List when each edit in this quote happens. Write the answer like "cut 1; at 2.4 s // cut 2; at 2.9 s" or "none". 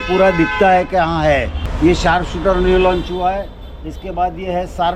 cut 1; at 1.6 s